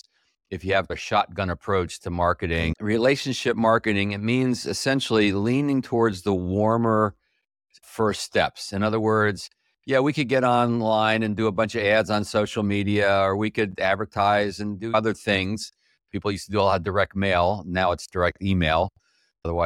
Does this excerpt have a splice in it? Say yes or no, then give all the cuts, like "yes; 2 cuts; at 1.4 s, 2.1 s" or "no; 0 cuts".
yes; 1 cut; at 2.7 s